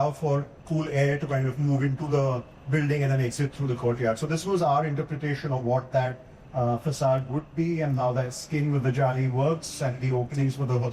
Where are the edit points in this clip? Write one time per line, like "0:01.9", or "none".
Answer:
none